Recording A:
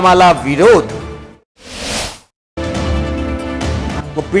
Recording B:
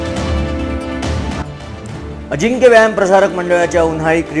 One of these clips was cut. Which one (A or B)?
B